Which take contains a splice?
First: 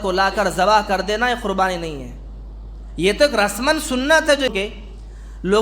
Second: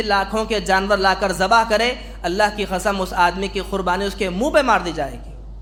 first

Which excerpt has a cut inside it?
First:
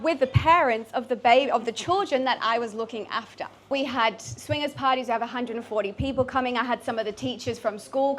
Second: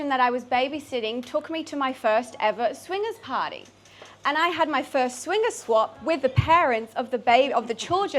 first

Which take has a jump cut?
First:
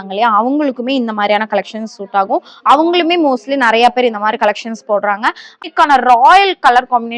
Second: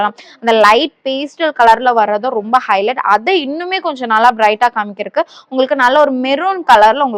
first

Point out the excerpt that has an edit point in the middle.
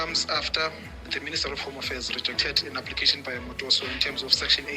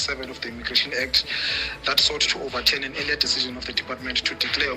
first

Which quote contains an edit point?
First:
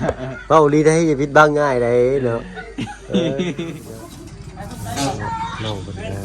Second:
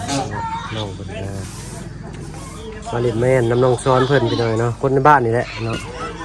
first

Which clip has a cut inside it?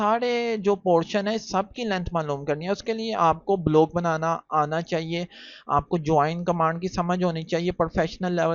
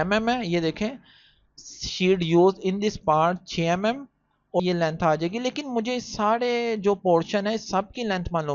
second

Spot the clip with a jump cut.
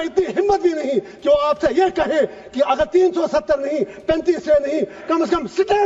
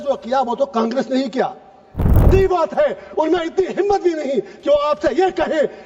second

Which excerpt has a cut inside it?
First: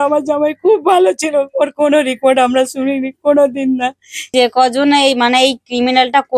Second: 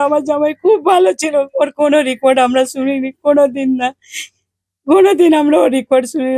first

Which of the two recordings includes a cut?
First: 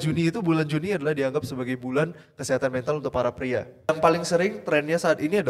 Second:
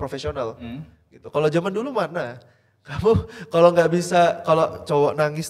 first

